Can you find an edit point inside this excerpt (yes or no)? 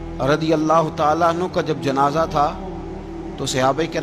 no